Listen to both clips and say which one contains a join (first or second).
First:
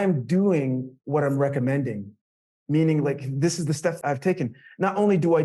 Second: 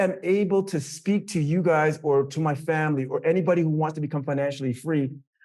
first